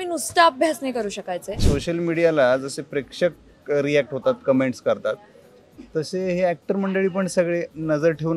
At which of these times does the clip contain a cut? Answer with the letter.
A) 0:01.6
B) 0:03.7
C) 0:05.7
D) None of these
A